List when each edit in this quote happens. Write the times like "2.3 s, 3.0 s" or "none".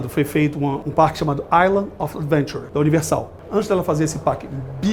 0.8 s, 2.6 s, 3.4 s